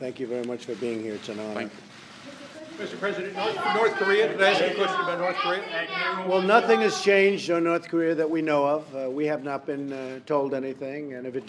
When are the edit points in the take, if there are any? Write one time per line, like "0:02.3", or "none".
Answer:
none